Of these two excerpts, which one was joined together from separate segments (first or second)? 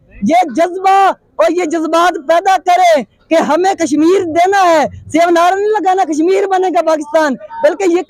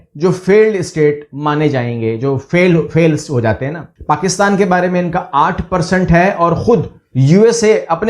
second